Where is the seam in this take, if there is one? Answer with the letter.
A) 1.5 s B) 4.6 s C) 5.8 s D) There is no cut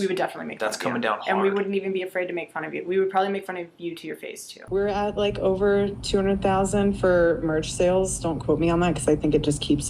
B